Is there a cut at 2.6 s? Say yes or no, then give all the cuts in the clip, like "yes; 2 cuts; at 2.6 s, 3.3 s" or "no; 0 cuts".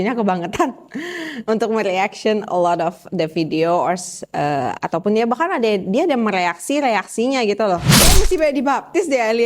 no; 1 cut; at 8.0 s